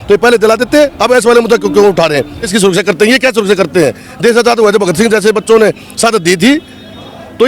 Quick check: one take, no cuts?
no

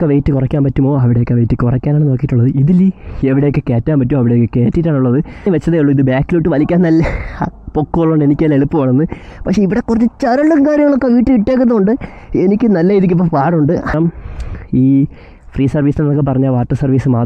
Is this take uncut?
no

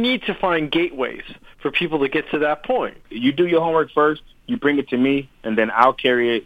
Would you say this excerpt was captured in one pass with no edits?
no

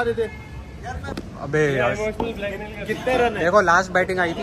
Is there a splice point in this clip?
yes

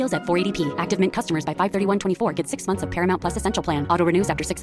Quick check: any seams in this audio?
no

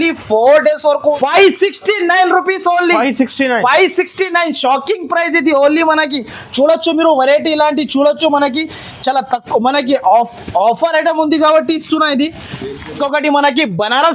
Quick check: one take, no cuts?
no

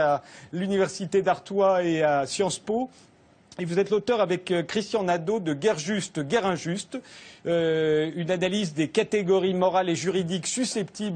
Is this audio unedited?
no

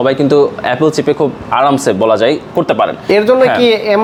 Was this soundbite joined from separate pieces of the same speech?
no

